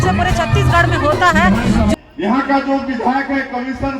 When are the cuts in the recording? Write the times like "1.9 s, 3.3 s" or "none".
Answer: 1.9 s